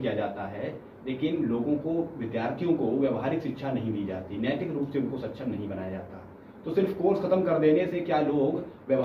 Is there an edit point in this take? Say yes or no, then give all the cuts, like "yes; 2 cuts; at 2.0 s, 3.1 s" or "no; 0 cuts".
no; 0 cuts